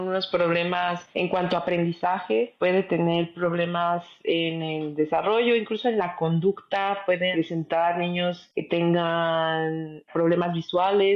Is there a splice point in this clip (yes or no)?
no